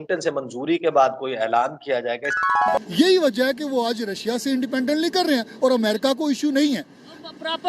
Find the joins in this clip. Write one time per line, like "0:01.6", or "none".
0:02.4